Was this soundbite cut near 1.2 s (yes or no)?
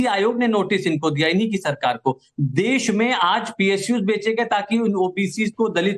no